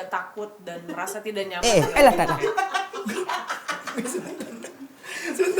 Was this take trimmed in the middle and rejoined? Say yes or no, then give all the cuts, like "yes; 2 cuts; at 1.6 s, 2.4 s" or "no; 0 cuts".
no; 0 cuts